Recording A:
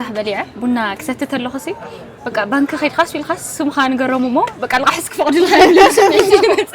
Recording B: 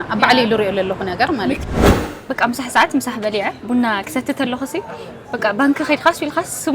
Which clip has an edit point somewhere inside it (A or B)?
B